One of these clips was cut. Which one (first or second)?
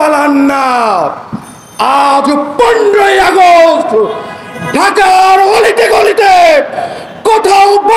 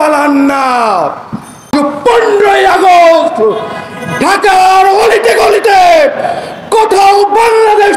second